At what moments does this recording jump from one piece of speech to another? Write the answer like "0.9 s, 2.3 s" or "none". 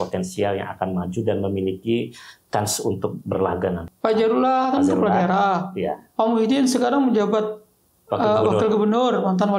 3.8 s